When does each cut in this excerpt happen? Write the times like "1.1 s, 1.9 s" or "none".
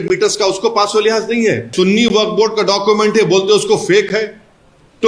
1.7 s